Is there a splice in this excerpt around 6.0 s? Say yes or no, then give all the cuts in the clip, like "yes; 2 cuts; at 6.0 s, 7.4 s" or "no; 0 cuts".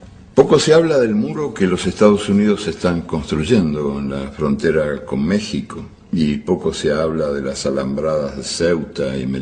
no; 1 cut; at 8.5 s